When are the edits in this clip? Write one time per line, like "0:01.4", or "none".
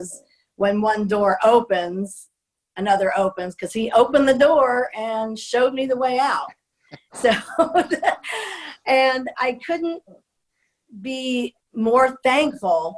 0:11.6